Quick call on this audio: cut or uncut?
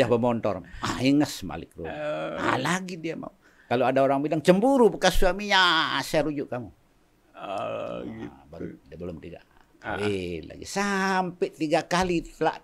uncut